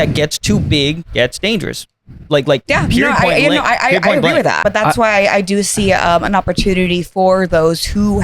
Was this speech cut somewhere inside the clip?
yes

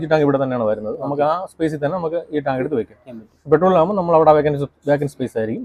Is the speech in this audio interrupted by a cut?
no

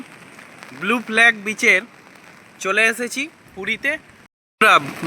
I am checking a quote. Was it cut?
yes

